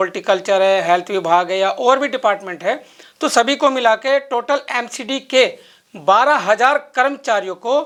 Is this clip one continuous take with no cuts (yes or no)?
yes